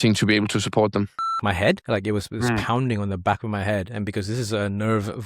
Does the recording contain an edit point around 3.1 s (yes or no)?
no